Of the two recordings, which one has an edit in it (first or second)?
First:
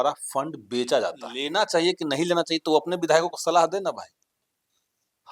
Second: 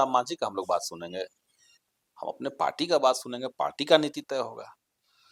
first